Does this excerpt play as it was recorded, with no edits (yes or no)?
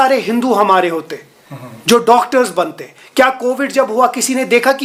yes